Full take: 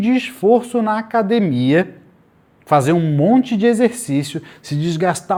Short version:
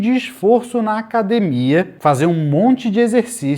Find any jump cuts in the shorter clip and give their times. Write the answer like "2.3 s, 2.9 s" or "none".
1.9 s